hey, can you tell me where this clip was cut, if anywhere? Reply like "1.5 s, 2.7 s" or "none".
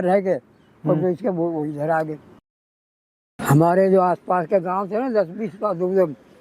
2.9 s